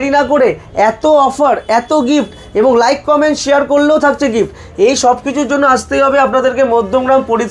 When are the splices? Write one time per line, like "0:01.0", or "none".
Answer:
none